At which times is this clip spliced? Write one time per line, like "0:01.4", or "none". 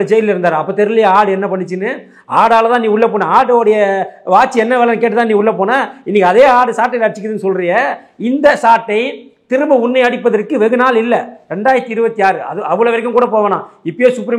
none